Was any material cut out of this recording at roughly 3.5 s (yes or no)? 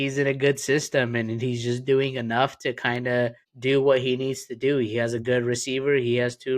yes